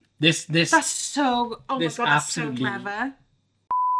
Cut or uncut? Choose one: uncut